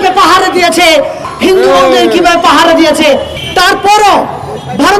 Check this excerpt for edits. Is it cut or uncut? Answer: cut